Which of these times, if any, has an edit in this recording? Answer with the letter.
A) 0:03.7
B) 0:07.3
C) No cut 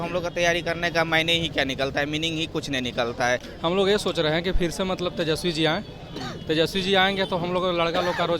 A